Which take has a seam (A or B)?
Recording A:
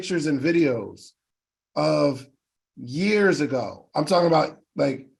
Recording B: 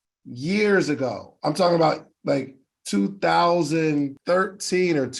B